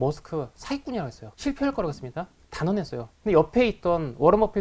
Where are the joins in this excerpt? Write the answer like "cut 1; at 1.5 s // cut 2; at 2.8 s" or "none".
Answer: cut 1; at 1.2 s // cut 2; at 2.4 s // cut 3; at 3.1 s

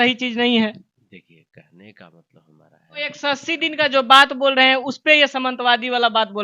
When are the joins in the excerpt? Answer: cut 1; at 2.9 s

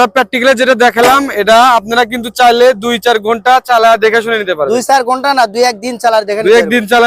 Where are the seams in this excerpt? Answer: none

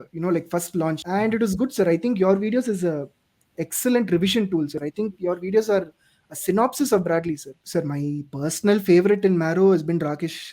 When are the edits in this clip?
cut 1; at 1.0 s // cut 2; at 4.8 s // cut 3; at 7.5 s

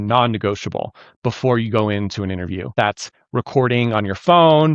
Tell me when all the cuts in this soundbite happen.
cut 1; at 2.7 s

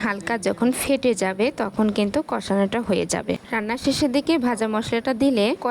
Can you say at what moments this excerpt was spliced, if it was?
cut 1; at 3.5 s

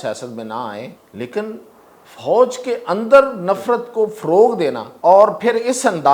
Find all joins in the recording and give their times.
cut 1; at 1.0 s // cut 2; at 4.9 s

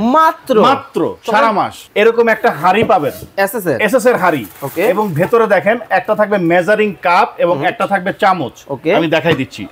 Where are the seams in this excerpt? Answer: cut 1; at 1.8 s

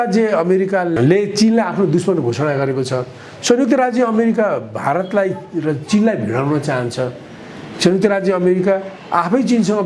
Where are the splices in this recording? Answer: cut 1; at 0.9 s

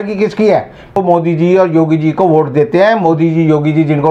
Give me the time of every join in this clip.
cut 1; at 0.9 s

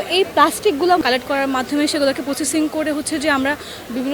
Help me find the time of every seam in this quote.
cut 1; at 1.0 s

